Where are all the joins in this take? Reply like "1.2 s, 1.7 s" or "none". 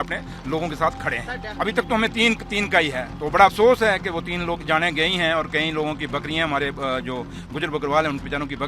1.5 s